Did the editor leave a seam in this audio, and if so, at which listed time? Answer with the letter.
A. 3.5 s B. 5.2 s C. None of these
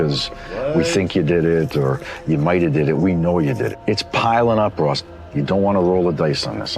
A